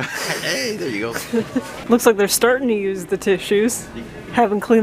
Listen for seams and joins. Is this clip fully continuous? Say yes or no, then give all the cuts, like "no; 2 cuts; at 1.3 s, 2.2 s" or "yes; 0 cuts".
yes; 0 cuts